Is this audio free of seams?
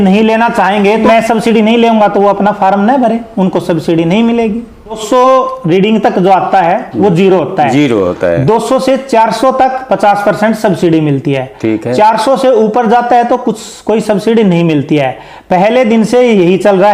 no; 2 cuts; at 1.0 s, 5.0 s

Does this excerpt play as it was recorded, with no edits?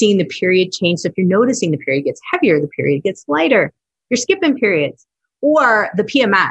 yes; 0 cuts

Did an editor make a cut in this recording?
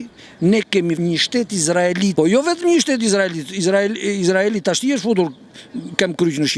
yes; 2 cuts; at 1.0 s, 2.1 s

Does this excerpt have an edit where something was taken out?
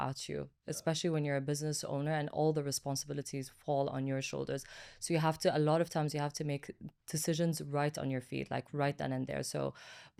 no; 0 cuts

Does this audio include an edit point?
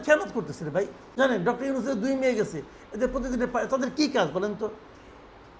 yes; 1 cut; at 1.0 s

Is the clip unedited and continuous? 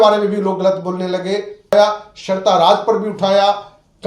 no; 1 cut; at 1.7 s

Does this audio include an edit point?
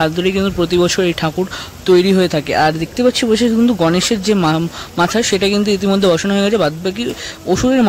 no; 0 cuts

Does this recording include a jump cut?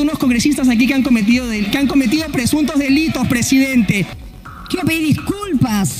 yes; 1 cut; at 4.2 s

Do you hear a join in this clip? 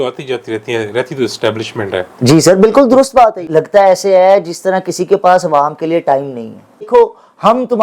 yes; 2 cuts; at 3.5 s, 6.9 s

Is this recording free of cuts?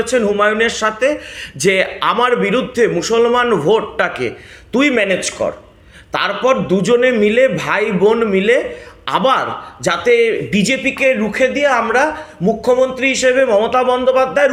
yes; 0 cuts

